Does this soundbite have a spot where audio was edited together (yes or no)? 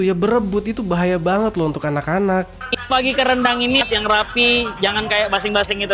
yes